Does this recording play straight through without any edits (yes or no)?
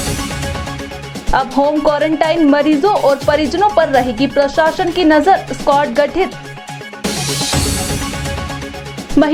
yes